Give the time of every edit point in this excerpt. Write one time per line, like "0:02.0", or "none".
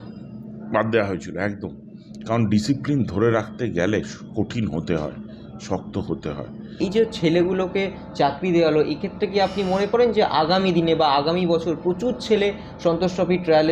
0:06.8